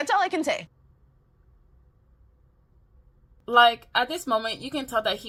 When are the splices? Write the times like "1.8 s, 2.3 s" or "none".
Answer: none